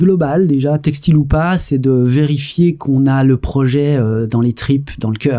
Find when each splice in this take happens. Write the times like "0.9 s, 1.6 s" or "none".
none